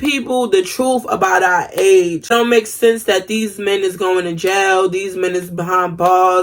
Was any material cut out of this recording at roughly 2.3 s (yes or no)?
yes